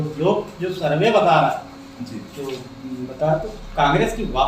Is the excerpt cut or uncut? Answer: uncut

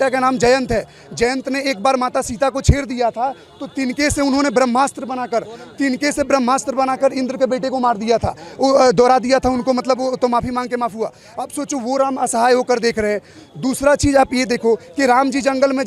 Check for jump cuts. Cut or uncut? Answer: uncut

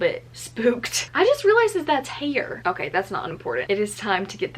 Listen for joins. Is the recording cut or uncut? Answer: cut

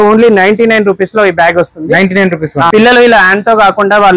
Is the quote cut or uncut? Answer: cut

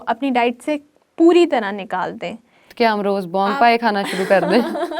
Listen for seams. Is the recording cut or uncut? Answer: uncut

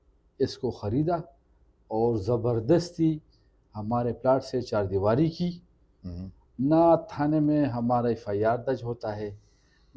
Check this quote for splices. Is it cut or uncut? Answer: uncut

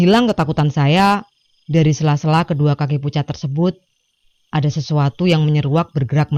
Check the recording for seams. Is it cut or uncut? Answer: uncut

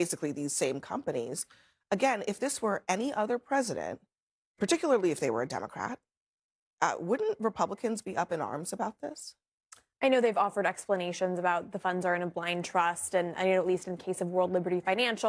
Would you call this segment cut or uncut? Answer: uncut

